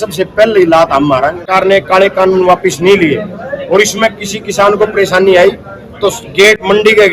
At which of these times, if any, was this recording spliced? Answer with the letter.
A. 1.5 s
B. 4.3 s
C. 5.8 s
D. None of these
A